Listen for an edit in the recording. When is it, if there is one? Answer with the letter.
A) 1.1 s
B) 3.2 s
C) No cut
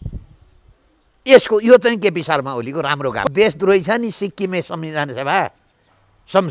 B